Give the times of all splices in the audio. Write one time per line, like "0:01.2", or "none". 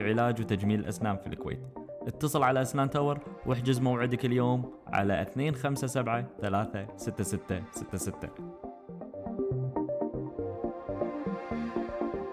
0:08.1